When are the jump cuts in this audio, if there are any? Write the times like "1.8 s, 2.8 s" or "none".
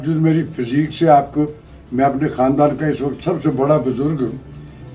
none